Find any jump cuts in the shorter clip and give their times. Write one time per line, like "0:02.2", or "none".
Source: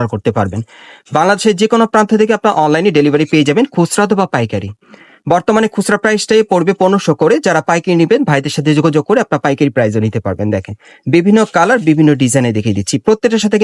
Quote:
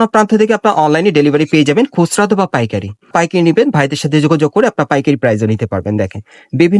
0:03.1